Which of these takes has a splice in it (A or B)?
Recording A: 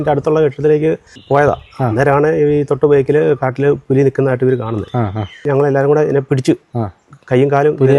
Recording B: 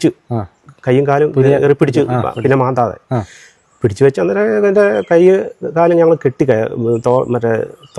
A